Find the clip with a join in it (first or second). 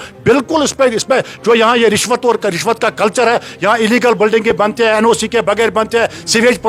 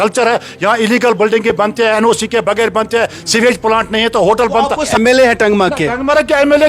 second